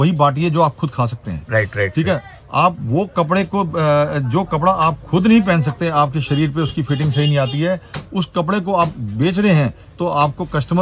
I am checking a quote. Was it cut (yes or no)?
no